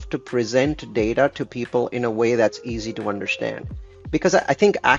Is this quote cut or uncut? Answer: cut